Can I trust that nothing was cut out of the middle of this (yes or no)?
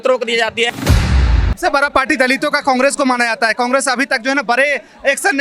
no